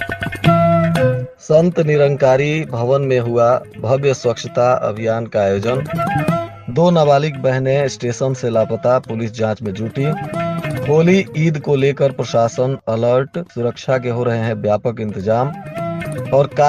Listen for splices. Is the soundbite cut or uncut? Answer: cut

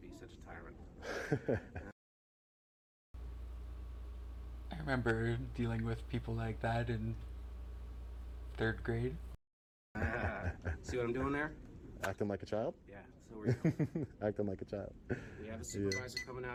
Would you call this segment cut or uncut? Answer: uncut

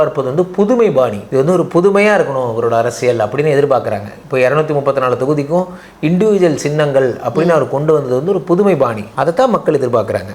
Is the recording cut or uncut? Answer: cut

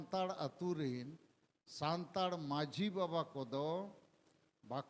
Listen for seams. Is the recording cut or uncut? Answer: uncut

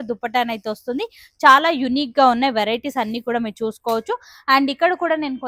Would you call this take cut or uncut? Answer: uncut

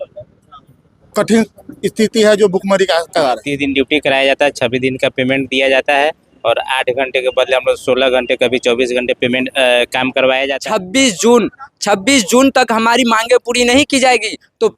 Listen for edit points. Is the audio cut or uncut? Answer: cut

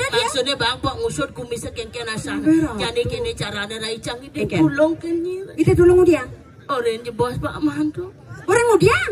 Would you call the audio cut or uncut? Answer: uncut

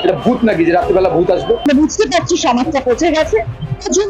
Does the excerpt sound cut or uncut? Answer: cut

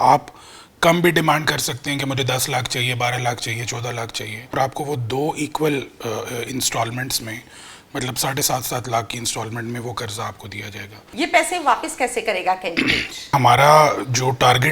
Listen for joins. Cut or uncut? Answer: cut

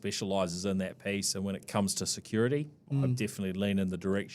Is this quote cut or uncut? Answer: cut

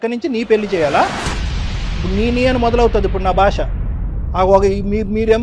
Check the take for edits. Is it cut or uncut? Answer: uncut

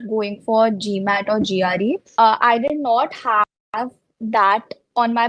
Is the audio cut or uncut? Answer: cut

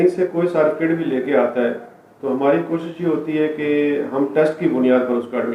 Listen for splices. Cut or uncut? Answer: uncut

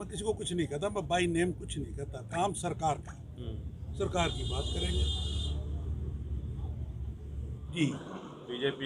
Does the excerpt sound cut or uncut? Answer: cut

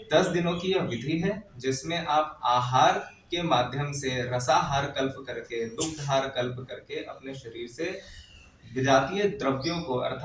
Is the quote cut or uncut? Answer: uncut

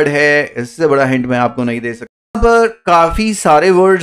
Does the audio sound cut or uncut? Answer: cut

